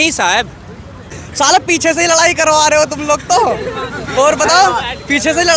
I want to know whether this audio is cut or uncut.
cut